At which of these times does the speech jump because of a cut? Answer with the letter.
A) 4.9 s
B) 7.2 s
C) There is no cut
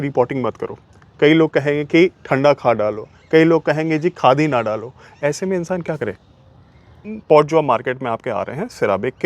B